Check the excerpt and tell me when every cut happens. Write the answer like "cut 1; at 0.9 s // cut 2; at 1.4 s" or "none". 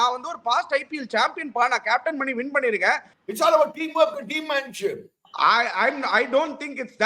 cut 1; at 3.2 s